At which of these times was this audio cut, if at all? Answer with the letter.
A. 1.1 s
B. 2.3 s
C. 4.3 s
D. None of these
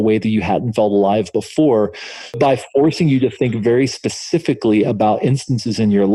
B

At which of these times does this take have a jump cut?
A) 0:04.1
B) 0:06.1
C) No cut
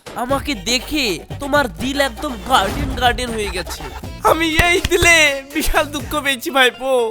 A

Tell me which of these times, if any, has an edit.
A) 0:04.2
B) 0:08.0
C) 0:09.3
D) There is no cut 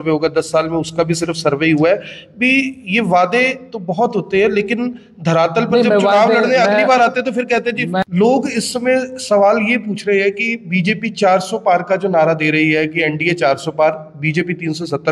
B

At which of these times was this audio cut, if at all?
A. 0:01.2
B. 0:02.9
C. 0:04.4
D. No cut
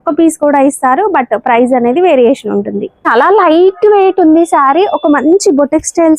B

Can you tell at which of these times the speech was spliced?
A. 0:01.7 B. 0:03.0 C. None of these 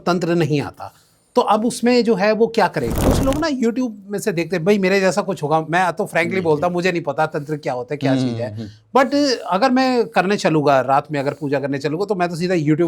B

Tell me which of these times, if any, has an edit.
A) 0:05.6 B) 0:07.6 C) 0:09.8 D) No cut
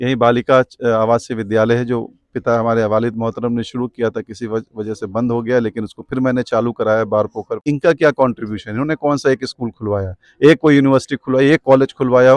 B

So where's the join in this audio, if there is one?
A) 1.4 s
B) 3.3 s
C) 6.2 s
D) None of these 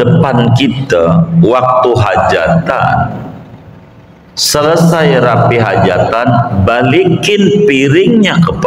D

